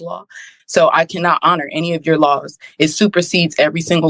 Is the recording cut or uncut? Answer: uncut